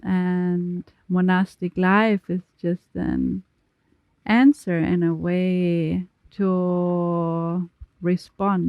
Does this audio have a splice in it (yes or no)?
yes